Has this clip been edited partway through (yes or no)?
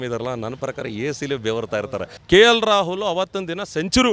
yes